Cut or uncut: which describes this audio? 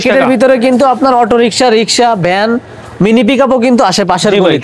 uncut